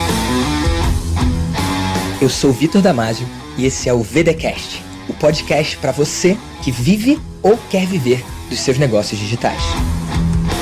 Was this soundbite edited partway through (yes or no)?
no